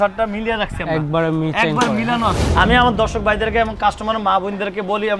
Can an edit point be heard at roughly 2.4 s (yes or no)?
yes